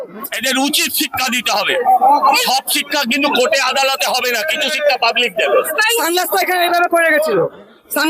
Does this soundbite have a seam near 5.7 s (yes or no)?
yes